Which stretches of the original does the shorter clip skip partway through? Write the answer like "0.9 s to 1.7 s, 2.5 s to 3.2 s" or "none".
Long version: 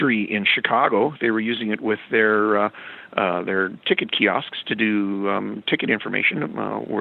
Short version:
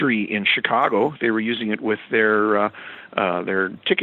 none